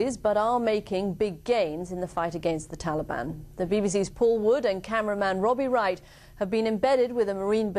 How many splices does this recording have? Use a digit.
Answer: 1